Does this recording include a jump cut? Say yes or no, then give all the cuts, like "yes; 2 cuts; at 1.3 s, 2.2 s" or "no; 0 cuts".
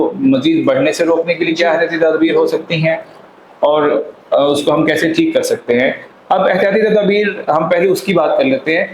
no; 0 cuts